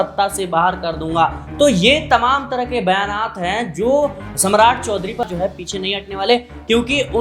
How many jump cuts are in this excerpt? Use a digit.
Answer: 1